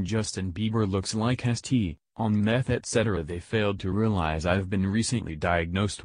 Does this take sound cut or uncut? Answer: cut